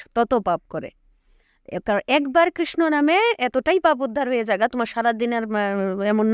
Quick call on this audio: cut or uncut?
uncut